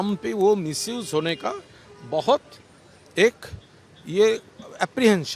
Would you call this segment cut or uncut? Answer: uncut